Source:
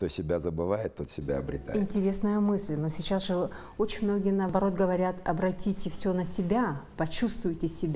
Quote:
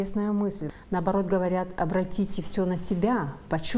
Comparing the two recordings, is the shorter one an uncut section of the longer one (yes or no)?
no